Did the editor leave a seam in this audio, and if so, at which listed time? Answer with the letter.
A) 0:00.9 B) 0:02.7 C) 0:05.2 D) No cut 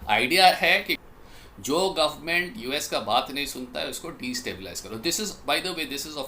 A